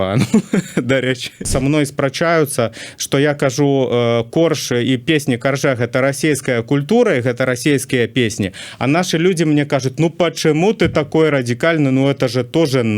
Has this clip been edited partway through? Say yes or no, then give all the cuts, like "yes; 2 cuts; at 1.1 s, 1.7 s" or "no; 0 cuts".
yes; 1 cut; at 1.4 s